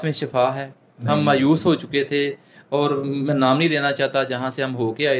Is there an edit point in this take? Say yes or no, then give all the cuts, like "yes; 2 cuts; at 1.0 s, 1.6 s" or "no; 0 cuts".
no; 0 cuts